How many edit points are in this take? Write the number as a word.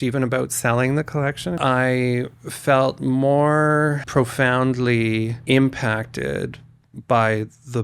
three